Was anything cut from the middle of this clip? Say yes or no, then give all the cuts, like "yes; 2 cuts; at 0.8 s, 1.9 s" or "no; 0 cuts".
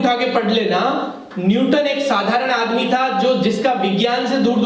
no; 0 cuts